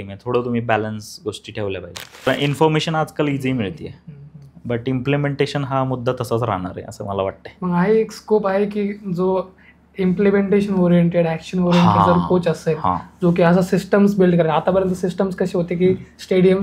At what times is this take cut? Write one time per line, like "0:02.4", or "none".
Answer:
0:02.3